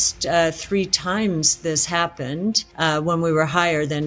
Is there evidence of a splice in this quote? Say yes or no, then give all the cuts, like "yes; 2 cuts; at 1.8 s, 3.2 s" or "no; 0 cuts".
yes; 1 cut; at 2.7 s